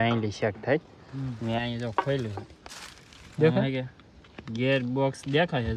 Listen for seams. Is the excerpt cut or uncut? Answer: uncut